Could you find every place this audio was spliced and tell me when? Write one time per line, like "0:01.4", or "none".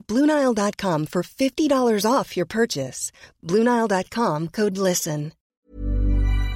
0:05.5